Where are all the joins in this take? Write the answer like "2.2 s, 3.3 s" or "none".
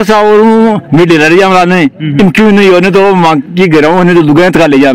none